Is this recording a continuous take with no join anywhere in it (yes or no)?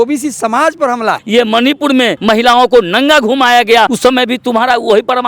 no